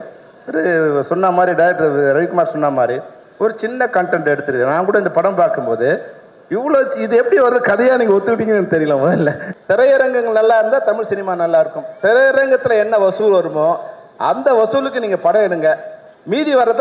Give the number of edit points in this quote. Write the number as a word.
one